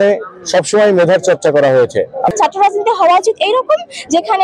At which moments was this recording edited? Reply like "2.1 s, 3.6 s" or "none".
2.2 s